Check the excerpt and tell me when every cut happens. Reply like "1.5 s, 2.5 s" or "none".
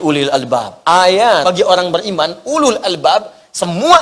1.4 s